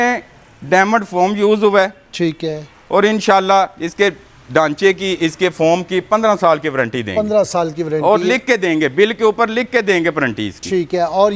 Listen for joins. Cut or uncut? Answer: uncut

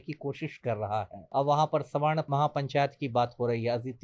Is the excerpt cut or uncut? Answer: cut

